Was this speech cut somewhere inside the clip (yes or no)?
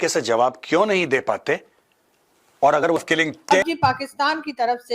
yes